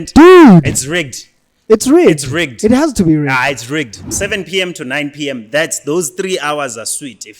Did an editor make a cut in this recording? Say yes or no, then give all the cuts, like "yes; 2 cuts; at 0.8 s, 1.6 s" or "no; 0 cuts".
yes; 1 cut; at 4.0 s